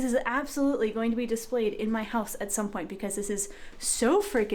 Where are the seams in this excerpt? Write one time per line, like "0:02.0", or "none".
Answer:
none